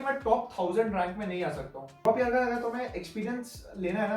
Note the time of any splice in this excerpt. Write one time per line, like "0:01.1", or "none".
0:01.9